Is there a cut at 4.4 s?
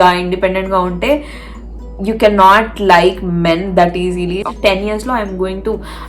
yes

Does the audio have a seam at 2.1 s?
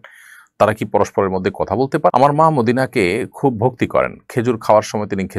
yes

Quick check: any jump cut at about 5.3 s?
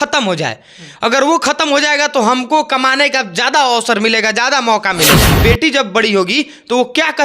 yes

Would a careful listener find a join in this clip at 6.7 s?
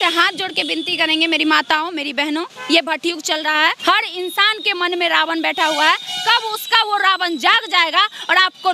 no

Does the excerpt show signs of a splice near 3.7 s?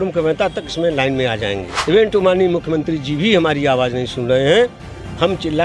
no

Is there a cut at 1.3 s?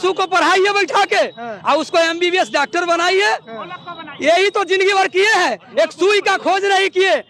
no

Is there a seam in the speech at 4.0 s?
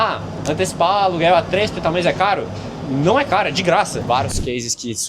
yes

